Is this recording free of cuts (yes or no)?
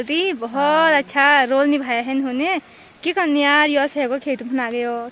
yes